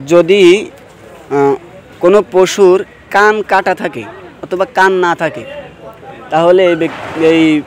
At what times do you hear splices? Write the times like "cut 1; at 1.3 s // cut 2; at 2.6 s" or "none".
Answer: none